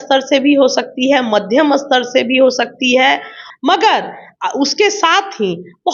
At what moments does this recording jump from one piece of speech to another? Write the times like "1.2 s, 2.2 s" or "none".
3.4 s